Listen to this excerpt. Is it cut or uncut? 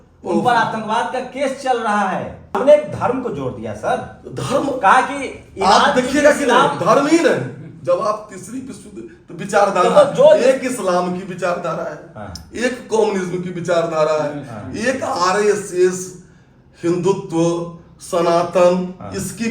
cut